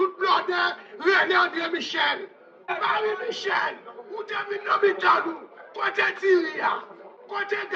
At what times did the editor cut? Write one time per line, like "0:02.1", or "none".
0:02.5